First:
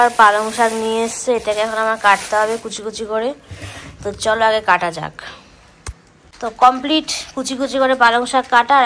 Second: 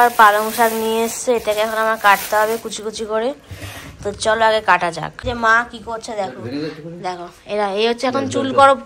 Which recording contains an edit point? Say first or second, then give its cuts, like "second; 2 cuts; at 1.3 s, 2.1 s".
second; 1 cut; at 5.2 s